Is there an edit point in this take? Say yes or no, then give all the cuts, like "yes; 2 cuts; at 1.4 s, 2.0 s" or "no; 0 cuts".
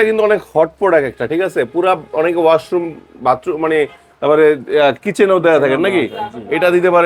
no; 0 cuts